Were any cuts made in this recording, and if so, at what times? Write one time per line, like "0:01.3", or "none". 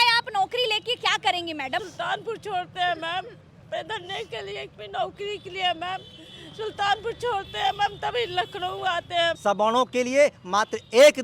0:01.8
0:09.4

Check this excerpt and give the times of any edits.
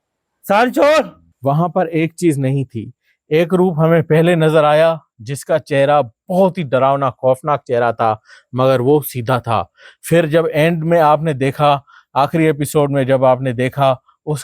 0:01.2

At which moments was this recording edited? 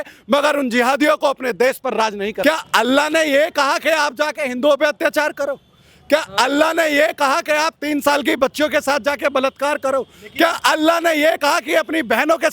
0:02.4

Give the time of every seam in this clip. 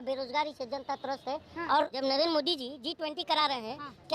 0:01.9

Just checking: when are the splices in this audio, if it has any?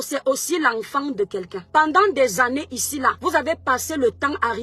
0:01.6
0:03.2

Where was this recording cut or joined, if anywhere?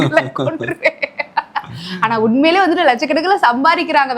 none

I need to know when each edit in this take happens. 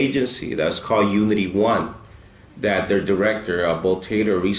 none

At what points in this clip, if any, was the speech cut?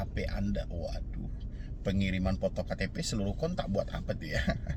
none

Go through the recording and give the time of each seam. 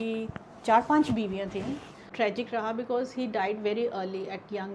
0:02.0

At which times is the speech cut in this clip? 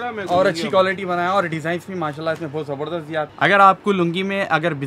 0:03.3

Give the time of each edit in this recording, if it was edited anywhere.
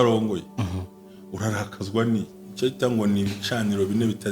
0:02.4

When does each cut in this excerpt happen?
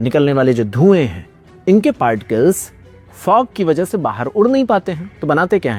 none

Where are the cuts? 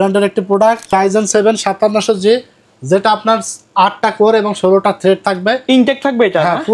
0:00.9

